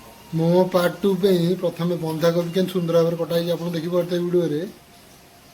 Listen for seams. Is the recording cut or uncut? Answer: uncut